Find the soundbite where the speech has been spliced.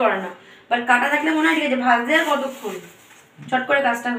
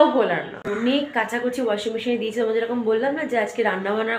second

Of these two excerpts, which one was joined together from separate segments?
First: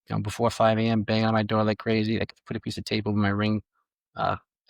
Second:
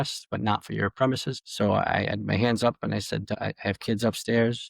second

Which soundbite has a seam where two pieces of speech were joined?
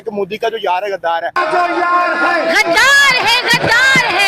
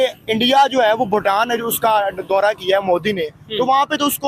first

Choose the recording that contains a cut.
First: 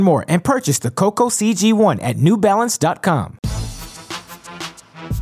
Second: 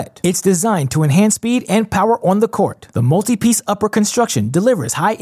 first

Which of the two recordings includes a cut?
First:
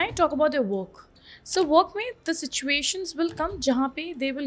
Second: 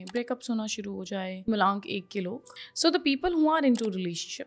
second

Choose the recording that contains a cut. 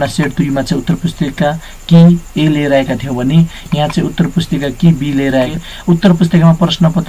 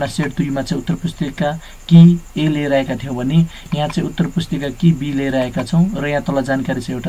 first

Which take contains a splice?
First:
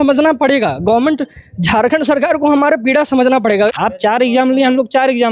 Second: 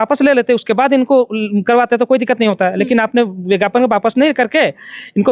first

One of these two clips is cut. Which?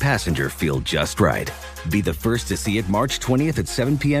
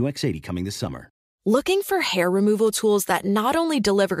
second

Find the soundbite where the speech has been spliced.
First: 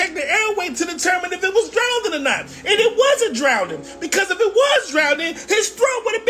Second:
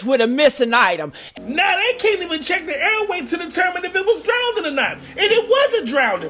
second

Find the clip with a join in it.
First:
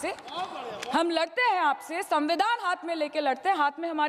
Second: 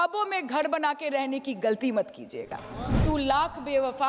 second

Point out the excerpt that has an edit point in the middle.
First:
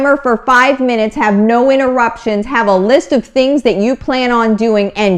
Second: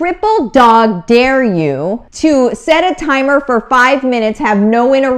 second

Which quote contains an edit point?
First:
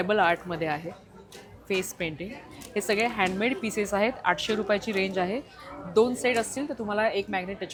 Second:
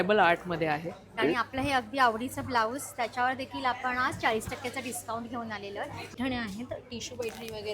second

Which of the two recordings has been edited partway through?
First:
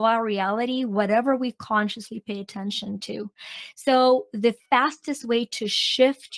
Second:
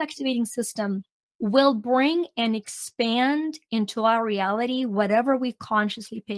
second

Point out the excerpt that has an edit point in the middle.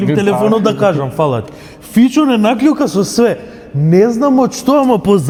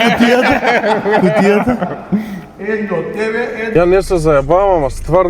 second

